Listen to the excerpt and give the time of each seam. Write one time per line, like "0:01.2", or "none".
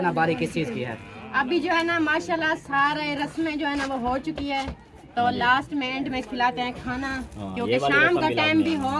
none